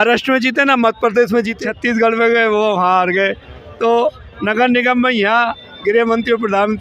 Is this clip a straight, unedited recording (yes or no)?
no